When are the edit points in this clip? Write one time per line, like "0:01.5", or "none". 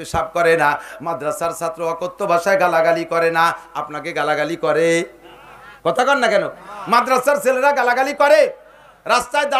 none